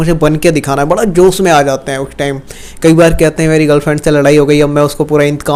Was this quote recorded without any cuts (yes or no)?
yes